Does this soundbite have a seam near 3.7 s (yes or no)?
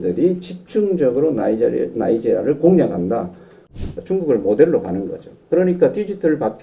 yes